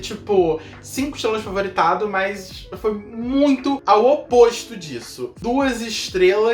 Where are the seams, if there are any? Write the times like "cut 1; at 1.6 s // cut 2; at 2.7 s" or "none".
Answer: cut 1; at 5.3 s